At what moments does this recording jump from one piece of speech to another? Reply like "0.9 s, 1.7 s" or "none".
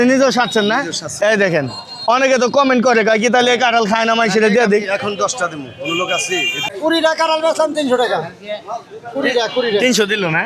6.6 s